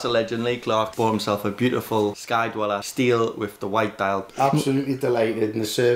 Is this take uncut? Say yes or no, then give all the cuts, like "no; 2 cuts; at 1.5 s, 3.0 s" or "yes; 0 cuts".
no; 2 cuts; at 0.9 s, 4.3 s